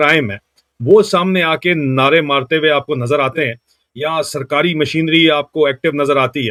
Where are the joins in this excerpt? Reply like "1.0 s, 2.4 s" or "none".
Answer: none